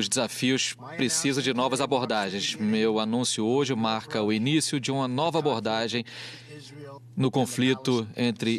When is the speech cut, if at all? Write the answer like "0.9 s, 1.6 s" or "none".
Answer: none